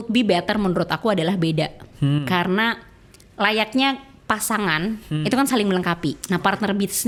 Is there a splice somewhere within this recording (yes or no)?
no